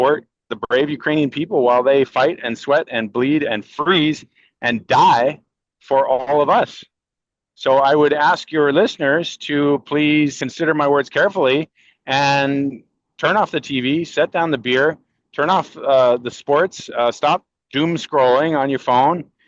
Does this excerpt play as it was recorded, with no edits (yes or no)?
no